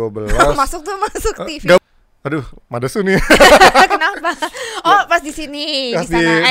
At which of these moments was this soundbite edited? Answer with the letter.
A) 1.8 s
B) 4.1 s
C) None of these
A